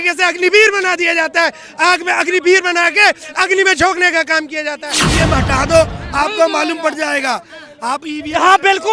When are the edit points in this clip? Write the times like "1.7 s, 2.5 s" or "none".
5.0 s